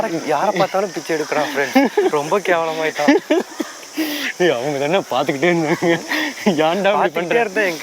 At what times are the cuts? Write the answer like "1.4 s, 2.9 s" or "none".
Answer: none